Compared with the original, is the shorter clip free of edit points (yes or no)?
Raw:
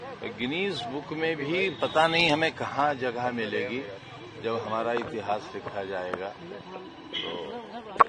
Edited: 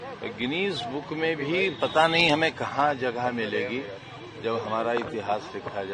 yes